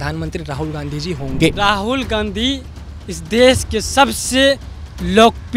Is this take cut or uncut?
uncut